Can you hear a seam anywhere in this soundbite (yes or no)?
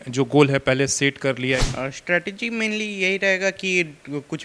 yes